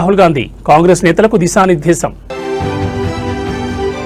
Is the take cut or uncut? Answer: uncut